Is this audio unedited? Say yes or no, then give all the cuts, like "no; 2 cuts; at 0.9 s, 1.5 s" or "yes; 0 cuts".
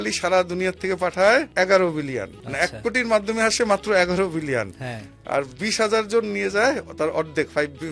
no; 2 cuts; at 1.5 s, 2.4 s